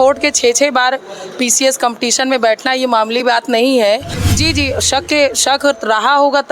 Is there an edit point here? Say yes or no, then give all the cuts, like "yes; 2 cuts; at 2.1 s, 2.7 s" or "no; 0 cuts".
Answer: yes; 1 cut; at 4.2 s